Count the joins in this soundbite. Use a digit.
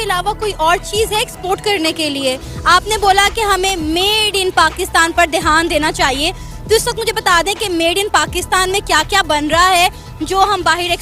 0